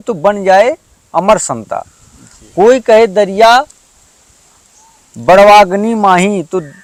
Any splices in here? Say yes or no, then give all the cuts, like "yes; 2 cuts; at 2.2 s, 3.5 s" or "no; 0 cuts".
no; 0 cuts